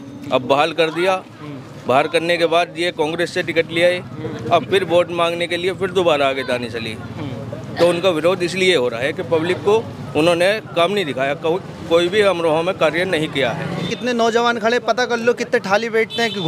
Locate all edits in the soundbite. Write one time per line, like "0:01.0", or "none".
0:13.9